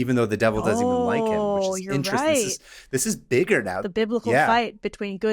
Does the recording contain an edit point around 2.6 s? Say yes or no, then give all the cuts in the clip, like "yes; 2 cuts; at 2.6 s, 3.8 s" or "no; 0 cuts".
no; 1 cut; at 3.8 s